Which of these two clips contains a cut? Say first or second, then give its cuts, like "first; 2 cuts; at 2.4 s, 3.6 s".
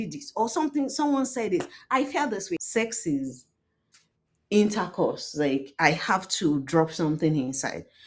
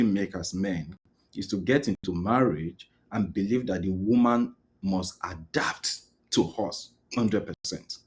first; 1 cut; at 2.6 s